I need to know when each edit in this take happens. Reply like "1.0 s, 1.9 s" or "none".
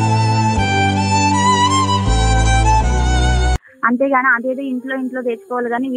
3.6 s